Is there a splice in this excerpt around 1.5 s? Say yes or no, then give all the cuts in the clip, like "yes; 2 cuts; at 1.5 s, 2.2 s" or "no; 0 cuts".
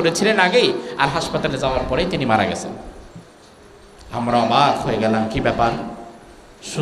no; 0 cuts